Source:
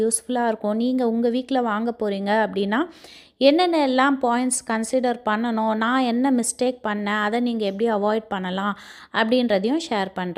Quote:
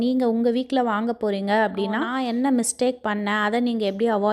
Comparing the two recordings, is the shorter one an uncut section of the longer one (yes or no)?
no